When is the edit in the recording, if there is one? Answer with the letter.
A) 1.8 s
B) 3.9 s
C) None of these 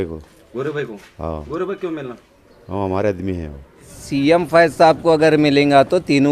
B